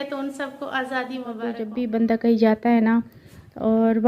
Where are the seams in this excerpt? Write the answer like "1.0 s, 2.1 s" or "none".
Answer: 1.6 s

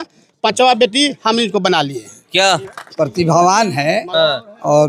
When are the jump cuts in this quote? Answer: 2.7 s

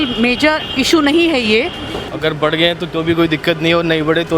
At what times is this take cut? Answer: 1.9 s

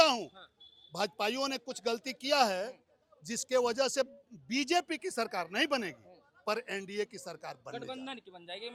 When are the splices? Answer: none

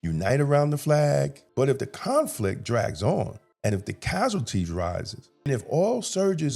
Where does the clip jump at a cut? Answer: 1.4 s, 3.4 s, 5.5 s

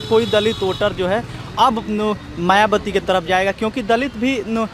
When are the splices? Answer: none

